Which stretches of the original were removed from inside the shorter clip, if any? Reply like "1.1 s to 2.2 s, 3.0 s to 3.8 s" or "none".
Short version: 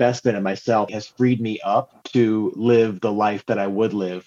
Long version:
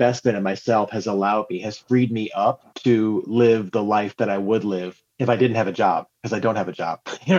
0.9 s to 1.6 s